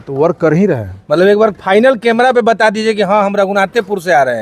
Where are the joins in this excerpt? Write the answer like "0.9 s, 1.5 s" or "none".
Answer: none